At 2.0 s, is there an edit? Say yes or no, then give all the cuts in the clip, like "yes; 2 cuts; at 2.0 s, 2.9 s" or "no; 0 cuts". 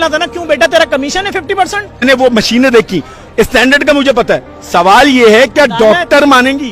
yes; 1 cut; at 2.0 s